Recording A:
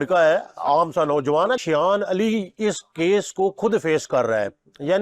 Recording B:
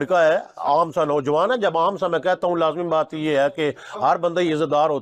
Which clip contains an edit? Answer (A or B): A